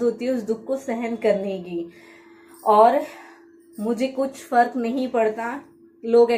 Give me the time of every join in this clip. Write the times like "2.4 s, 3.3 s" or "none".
none